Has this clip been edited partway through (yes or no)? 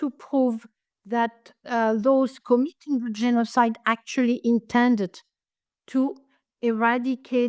no